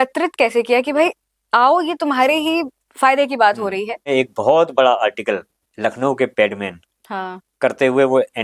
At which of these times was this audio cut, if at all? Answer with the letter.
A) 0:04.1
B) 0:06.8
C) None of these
A